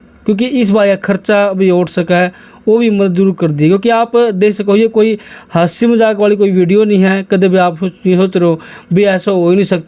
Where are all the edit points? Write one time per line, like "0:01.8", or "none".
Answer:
none